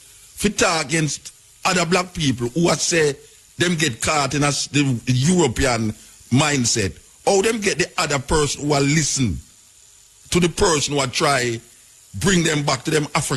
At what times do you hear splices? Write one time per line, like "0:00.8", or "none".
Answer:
none